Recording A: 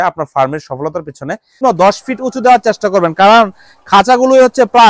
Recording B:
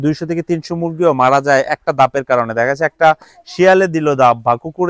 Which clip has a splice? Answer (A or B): A